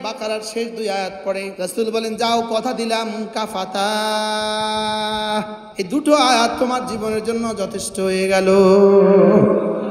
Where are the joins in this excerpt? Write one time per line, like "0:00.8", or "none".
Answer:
0:01.5
0:05.6